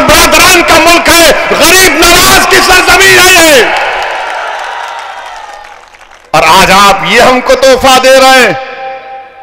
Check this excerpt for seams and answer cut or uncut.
uncut